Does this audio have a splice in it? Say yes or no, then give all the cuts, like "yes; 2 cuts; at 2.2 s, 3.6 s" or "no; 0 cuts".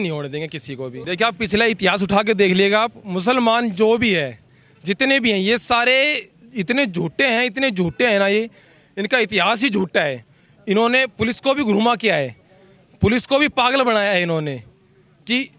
no; 0 cuts